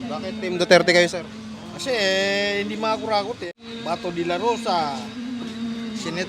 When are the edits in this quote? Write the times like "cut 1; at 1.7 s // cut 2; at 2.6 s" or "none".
cut 1; at 3.4 s